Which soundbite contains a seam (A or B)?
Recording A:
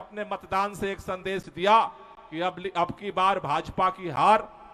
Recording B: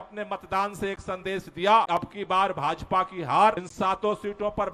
B